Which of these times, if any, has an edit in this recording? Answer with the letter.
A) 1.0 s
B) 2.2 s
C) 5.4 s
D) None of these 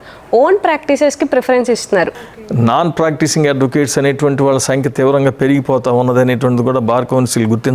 B